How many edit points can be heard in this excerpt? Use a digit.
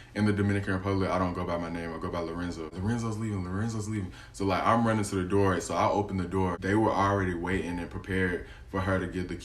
2